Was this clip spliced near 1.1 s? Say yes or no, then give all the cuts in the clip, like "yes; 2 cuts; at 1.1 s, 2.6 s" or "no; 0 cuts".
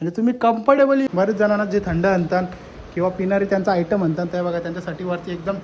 yes; 1 cut; at 1.1 s